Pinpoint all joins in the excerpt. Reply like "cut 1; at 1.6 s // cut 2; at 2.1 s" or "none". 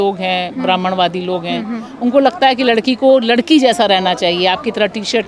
none